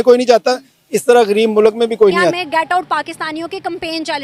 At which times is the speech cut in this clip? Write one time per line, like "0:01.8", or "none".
0:02.4